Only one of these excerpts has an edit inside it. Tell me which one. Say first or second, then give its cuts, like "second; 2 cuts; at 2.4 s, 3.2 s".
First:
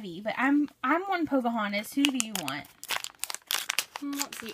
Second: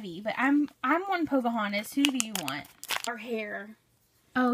first; 1 cut; at 3.0 s